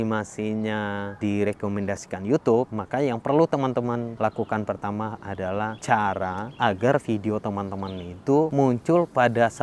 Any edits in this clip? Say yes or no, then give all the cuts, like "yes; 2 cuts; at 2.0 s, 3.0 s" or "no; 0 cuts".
yes; 6 cuts; at 1.2 s, 2.8 s, 4.1 s, 5.5 s, 6.5 s, 8.5 s